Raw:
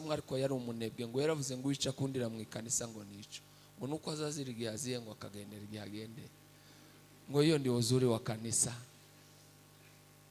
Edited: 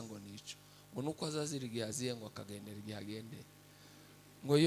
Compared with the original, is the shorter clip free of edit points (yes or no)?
yes